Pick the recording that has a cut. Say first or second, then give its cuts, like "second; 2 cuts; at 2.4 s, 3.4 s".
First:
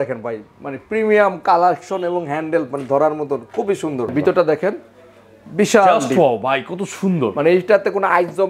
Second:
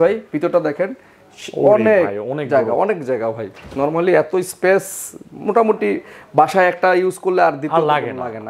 first; 1 cut; at 4.1 s